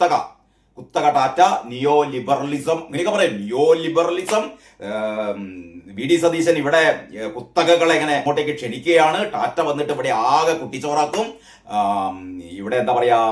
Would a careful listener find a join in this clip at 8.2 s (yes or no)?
yes